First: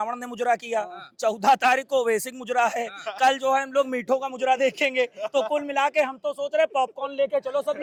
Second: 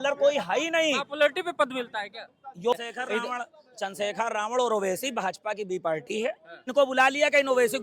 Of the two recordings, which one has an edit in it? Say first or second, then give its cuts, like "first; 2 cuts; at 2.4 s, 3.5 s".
second; 2 cuts; at 2.7 s, 6.7 s